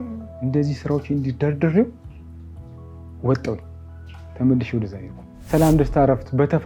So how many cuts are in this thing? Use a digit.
1